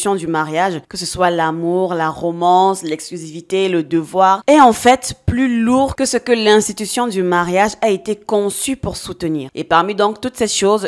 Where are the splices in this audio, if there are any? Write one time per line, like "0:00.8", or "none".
0:04.4